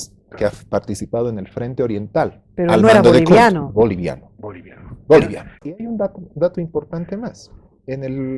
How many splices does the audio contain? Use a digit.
1